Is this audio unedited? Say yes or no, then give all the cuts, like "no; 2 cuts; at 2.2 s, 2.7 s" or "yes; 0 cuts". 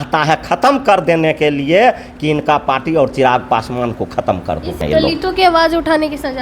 no; 1 cut; at 4.8 s